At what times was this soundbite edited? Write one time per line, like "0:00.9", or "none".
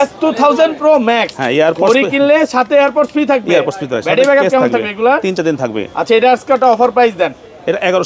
none